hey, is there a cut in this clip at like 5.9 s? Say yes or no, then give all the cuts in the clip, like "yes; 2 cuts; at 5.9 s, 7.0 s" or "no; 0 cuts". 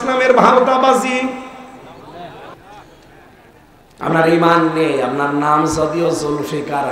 no; 1 cut; at 2.5 s